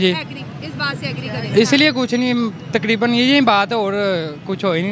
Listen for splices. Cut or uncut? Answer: uncut